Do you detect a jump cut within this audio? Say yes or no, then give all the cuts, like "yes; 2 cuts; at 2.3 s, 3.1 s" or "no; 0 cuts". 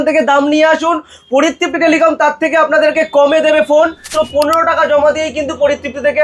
yes; 1 cut; at 4.1 s